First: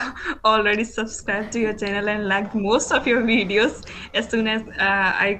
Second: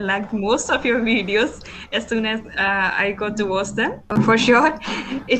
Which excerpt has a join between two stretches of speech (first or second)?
second